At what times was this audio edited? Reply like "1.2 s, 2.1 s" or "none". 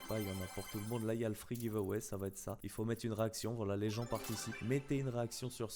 none